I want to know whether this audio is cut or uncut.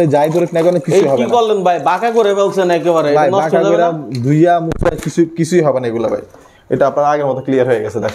uncut